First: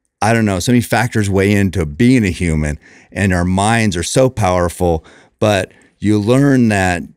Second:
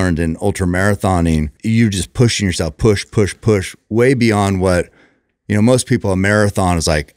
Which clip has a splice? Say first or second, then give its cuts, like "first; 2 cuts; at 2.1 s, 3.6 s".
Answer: second; 1 cut; at 1.5 s